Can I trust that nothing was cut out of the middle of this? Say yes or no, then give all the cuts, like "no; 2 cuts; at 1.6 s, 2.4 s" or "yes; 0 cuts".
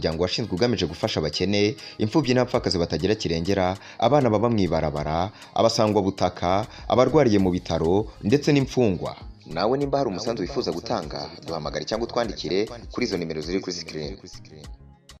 yes; 0 cuts